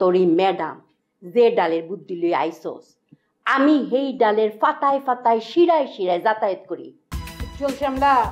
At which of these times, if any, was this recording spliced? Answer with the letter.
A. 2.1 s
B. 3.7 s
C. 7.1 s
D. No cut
C